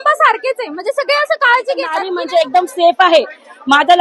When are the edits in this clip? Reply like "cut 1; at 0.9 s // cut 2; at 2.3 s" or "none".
cut 1; at 2.1 s